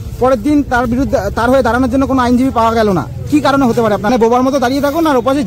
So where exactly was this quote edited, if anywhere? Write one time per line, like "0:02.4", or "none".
0:04.1